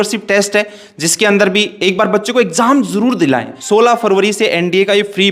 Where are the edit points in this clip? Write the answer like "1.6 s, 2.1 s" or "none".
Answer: 3.5 s